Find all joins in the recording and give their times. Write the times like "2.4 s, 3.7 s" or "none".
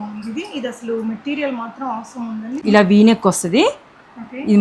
2.5 s